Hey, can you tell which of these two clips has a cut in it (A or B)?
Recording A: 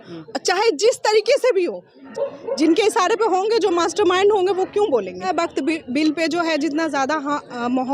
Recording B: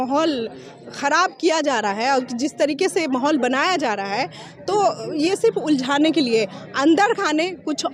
A